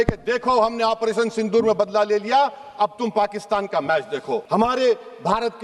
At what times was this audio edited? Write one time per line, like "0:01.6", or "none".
0:04.4